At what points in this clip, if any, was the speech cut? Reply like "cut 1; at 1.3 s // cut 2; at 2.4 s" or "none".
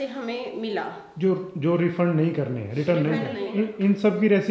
cut 1; at 3.4 s